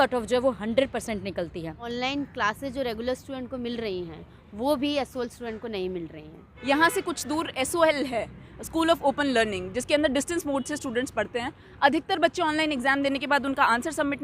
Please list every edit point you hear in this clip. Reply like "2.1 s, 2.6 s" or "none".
1.8 s, 6.4 s